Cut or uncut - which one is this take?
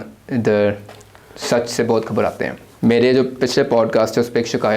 cut